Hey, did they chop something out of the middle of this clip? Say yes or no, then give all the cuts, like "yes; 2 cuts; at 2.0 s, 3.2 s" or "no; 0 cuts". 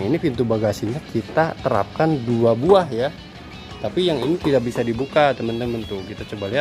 no; 0 cuts